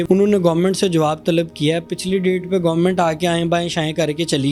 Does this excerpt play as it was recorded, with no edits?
yes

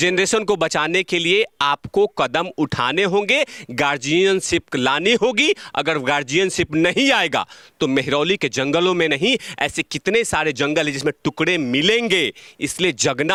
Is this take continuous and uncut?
yes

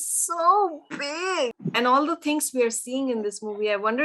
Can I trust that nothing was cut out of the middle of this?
no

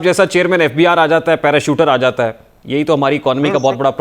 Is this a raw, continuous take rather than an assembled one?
yes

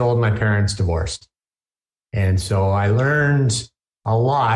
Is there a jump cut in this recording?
no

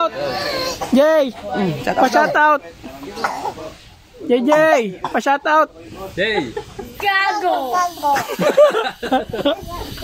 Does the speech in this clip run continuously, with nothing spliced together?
yes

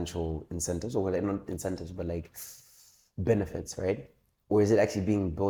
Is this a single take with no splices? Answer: yes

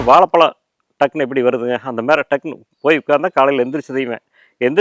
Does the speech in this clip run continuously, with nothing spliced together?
yes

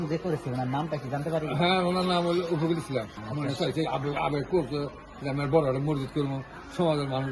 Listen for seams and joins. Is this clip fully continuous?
no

